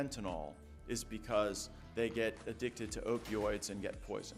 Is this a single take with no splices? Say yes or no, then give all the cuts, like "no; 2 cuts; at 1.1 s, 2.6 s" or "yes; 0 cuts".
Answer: yes; 0 cuts